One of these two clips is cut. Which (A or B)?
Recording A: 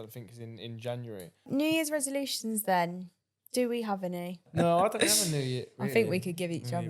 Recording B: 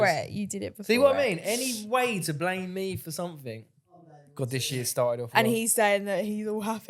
A